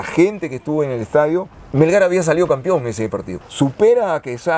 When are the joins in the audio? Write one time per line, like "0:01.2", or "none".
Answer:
0:01.6
0:03.3